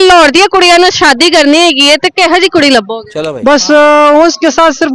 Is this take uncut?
yes; 0 cuts

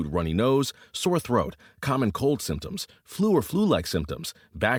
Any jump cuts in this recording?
no; 0 cuts

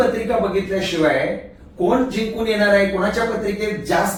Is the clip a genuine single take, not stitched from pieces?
yes; 0 cuts

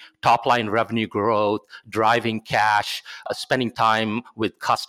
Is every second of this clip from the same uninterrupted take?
no; 1 cut; at 3.3 s

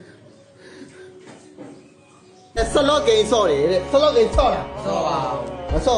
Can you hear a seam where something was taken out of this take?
yes; 1 cut; at 2.6 s

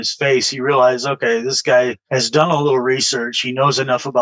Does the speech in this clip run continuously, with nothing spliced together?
no; 1 cut; at 2.0 s

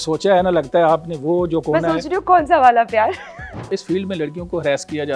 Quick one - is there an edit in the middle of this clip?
yes; 1 cut; at 3.8 s

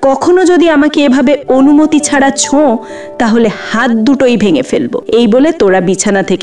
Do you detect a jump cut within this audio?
yes; 1 cut; at 5.0 s

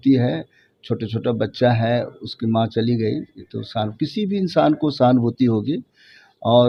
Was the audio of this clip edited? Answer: no; 0 cuts

